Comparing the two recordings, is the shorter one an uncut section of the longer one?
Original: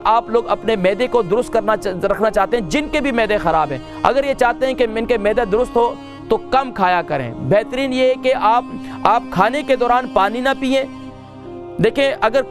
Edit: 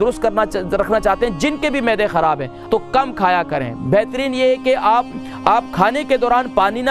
no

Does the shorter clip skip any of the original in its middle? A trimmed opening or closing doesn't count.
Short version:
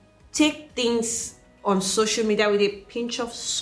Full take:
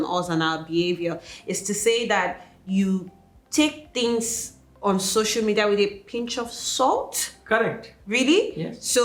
no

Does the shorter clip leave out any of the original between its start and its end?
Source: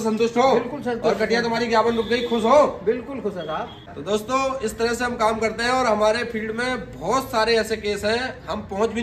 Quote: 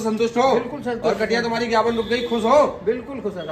no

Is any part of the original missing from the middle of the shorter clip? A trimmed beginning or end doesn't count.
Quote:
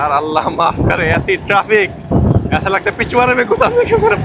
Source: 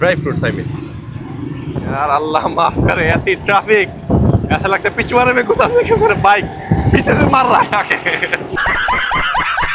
no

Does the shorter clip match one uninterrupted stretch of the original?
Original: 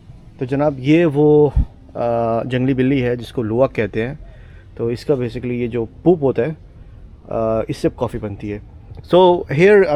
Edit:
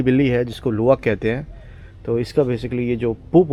yes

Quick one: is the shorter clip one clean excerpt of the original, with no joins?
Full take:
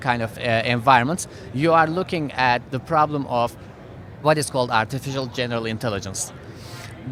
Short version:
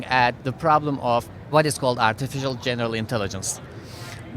no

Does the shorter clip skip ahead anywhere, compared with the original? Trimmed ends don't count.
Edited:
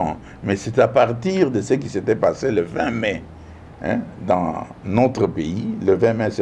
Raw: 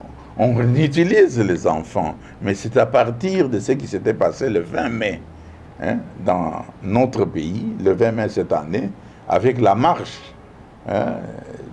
no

